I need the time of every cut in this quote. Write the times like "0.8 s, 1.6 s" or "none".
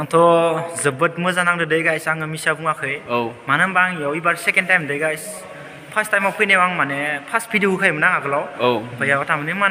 none